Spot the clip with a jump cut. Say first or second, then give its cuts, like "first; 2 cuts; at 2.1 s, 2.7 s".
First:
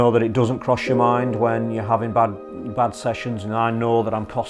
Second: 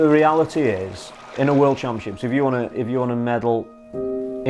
second; 1 cut; at 1.2 s